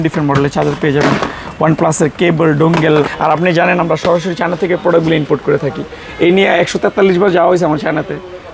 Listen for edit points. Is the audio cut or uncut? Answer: cut